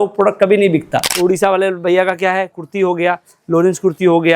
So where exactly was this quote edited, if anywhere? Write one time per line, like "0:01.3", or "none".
0:01.1